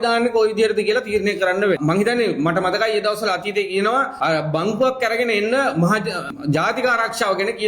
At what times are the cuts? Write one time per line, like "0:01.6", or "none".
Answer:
0:01.8
0:04.1
0:06.4